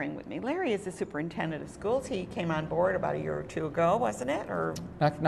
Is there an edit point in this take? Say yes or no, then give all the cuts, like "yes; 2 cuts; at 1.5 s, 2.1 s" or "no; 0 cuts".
no; 0 cuts